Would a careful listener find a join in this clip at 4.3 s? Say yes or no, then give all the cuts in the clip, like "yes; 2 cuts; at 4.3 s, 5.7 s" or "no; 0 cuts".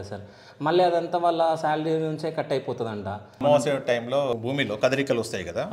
yes; 2 cuts; at 3.4 s, 4.3 s